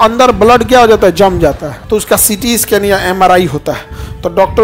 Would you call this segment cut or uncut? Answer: cut